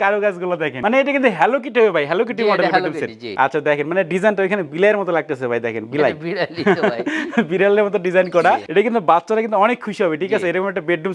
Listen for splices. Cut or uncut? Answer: uncut